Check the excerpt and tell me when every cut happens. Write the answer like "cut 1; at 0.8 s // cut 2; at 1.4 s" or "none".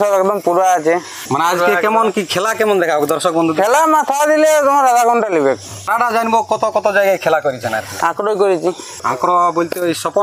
cut 1; at 1.2 s // cut 2; at 5.8 s // cut 3; at 9.0 s